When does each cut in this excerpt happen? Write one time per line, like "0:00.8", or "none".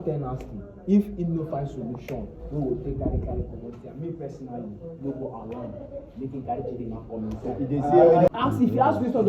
0:08.3